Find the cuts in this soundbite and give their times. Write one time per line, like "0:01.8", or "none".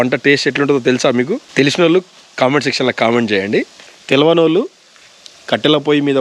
none